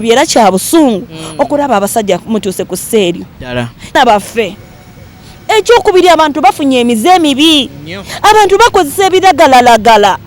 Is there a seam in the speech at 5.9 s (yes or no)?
no